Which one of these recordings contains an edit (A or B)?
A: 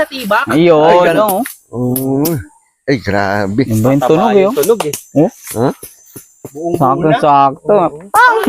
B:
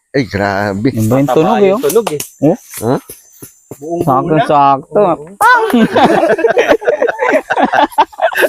A